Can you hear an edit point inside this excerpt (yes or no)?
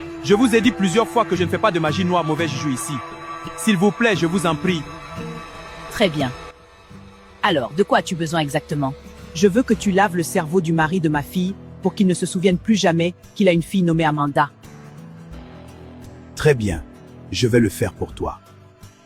no